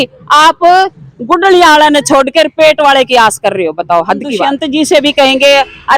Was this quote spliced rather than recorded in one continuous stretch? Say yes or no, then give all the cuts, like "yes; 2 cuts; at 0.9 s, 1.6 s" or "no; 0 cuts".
yes; 1 cut; at 4.5 s